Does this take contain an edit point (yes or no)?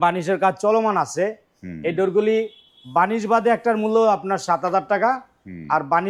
no